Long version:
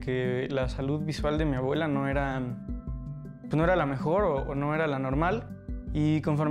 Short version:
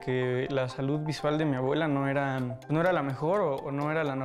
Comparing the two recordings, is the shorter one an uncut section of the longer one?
no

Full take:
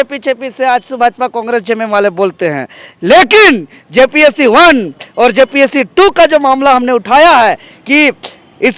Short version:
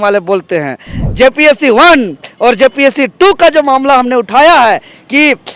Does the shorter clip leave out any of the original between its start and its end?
yes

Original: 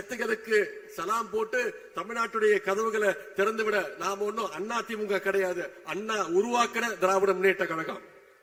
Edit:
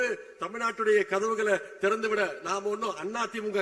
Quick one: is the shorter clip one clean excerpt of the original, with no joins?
yes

